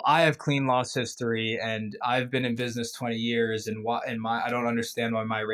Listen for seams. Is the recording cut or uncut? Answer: uncut